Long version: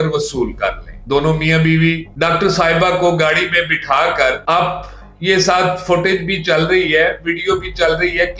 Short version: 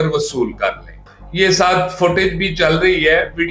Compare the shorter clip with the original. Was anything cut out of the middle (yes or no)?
yes